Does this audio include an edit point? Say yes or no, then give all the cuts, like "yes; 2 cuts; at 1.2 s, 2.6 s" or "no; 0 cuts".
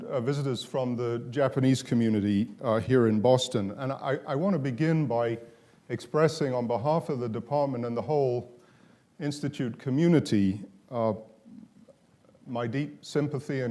no; 0 cuts